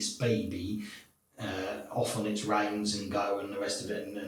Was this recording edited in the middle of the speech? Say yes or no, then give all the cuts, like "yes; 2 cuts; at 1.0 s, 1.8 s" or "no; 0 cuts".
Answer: no; 0 cuts